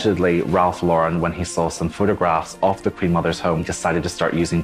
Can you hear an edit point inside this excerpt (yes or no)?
yes